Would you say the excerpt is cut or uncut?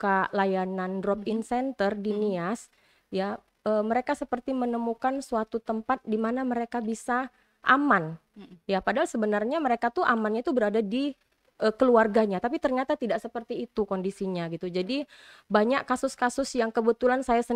uncut